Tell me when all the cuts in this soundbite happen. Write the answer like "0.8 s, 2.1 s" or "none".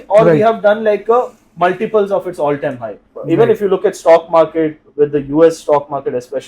3.1 s